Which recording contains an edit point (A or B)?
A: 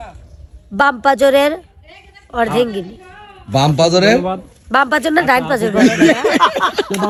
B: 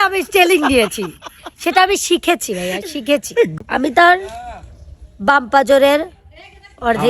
B